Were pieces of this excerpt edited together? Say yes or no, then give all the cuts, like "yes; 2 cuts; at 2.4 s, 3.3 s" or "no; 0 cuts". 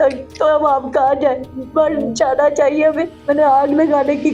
yes; 1 cut; at 3.1 s